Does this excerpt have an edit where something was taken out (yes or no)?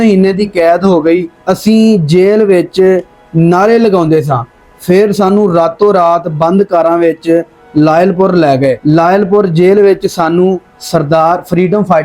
yes